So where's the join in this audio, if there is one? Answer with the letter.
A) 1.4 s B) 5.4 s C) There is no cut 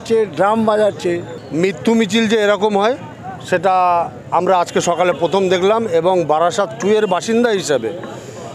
A